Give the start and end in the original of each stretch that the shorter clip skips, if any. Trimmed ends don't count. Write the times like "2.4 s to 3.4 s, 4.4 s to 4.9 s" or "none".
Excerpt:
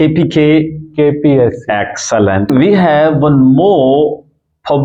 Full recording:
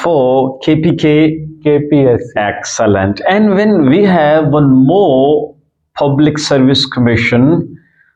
3.2 s to 3.8 s